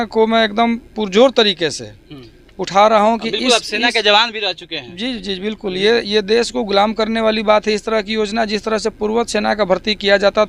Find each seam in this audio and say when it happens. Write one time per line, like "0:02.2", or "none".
none